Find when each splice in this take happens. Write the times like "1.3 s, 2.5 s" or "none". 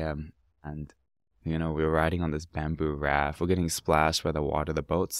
none